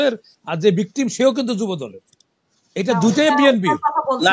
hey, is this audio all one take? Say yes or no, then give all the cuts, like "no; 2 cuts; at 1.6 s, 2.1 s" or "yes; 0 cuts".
yes; 0 cuts